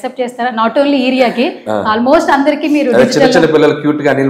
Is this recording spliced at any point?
no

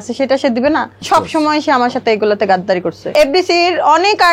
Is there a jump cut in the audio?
yes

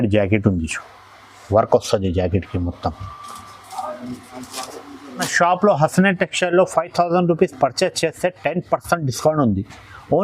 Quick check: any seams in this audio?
yes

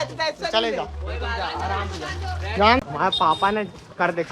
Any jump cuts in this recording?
yes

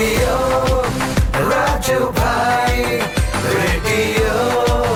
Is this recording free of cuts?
yes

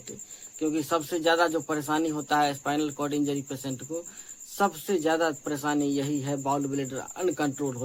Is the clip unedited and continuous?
yes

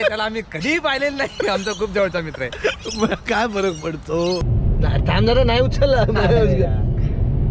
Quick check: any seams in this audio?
yes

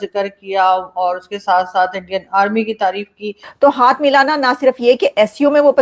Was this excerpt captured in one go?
no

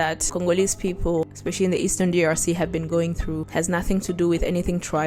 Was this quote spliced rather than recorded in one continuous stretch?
no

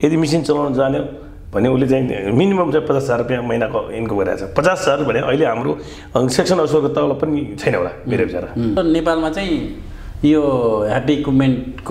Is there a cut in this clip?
yes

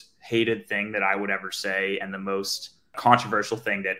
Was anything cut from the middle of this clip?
yes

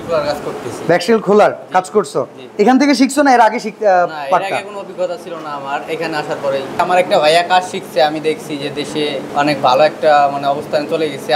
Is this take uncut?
no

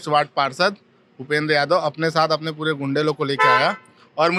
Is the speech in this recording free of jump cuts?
yes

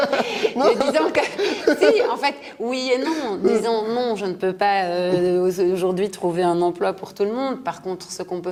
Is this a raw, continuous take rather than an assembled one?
yes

